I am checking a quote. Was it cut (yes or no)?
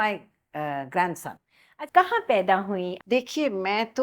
yes